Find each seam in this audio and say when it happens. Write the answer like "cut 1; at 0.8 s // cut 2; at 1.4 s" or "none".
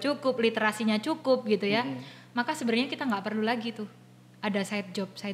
none